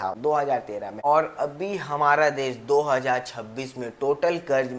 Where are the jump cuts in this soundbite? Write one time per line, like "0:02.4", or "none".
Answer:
none